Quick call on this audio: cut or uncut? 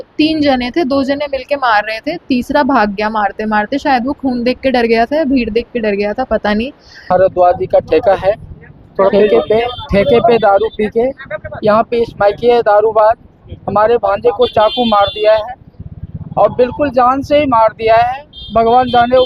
cut